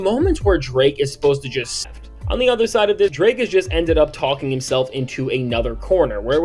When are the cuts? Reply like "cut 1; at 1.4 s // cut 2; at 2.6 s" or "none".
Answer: cut 1; at 1.8 s

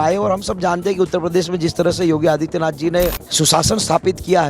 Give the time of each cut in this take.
cut 1; at 3.2 s

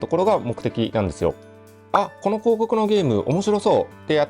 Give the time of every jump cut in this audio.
cut 1; at 1.9 s

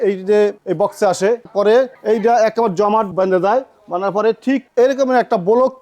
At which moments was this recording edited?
cut 1; at 1.5 s

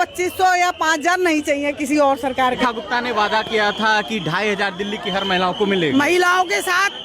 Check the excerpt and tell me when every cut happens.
cut 1; at 2.6 s

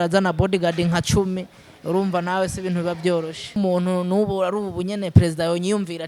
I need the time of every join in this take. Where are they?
cut 1; at 3.6 s

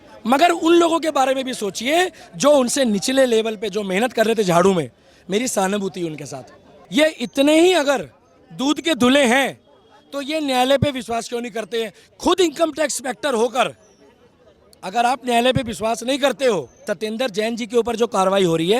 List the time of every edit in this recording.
cut 1; at 6.8 s // cut 2; at 16.7 s

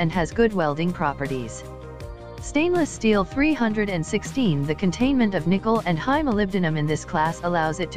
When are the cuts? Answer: none

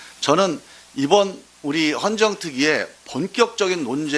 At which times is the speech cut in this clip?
cut 1; at 1.5 s

